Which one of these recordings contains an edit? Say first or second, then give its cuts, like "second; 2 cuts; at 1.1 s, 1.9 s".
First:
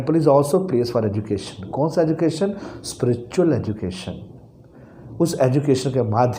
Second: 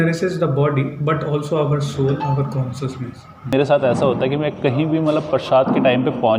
second; 1 cut; at 3.5 s